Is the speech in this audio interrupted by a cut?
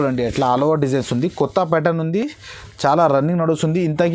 no; 0 cuts

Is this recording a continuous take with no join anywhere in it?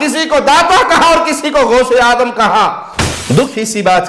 no; 1 cut; at 2.9 s

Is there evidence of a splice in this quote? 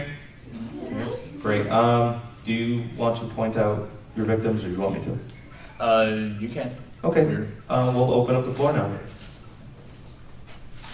yes; 1 cut; at 2.6 s

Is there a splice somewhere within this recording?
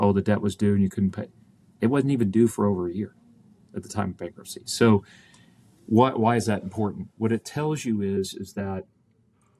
no; 0 cuts

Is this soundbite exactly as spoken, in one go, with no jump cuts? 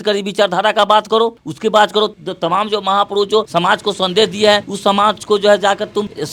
yes; 0 cuts

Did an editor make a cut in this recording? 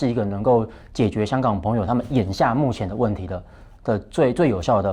no; 0 cuts

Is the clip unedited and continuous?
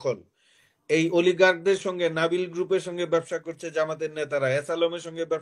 yes; 0 cuts

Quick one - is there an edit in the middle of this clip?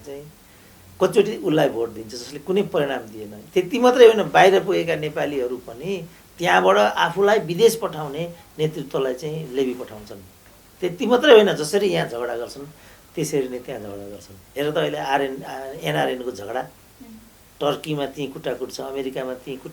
no; 0 cuts

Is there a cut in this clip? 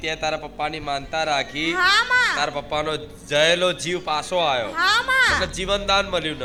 no; 0 cuts

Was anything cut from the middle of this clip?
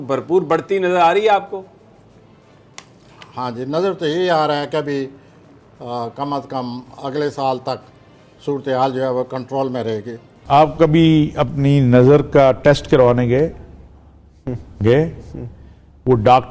yes; 1 cut; at 10.4 s

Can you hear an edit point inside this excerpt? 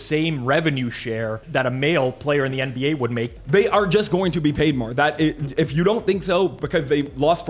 yes; 2 cuts; at 1.4 s, 3.4 s

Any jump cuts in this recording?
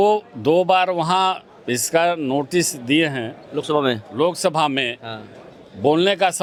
no; 0 cuts

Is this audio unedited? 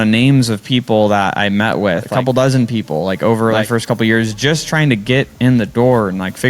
no; 2 cuts; at 2.1 s, 3.6 s

